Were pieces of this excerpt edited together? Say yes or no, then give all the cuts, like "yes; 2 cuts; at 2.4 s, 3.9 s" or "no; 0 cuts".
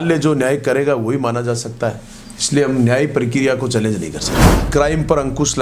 yes; 1 cut; at 4.7 s